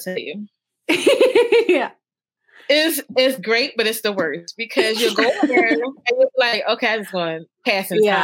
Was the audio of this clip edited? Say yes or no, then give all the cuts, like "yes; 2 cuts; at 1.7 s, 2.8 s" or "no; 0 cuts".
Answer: no; 0 cuts